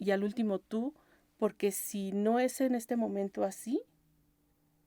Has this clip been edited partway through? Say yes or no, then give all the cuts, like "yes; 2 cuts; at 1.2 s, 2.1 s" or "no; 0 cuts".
no; 0 cuts